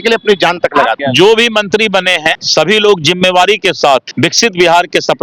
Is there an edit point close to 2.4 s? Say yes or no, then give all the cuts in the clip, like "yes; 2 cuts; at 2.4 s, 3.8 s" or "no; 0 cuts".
yes; 3 cuts; at 0.9 s, 2.4 s, 4.1 s